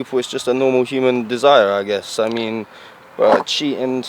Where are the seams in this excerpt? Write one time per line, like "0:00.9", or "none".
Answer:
none

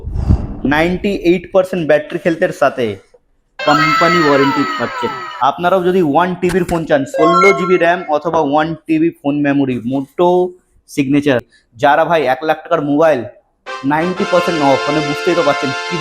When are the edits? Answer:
0:05.2
0:11.6

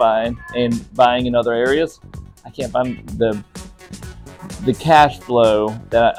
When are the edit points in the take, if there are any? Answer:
none

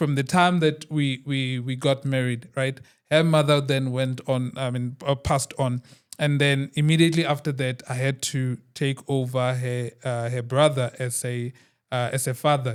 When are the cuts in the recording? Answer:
none

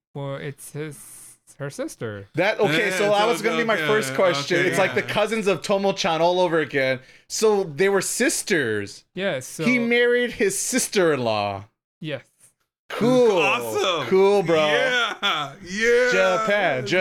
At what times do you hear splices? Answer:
none

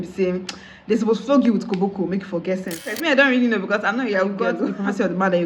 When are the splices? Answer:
0:02.9
0:04.6

